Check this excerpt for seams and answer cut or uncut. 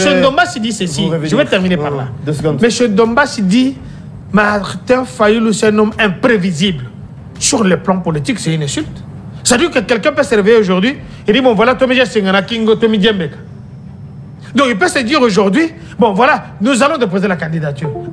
uncut